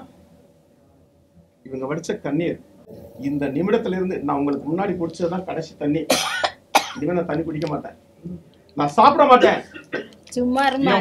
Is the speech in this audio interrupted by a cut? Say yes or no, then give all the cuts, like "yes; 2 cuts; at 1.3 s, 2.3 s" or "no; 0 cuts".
yes; 1 cut; at 3.0 s